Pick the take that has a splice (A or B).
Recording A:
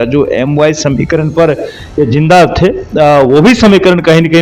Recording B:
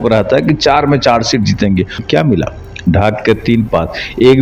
B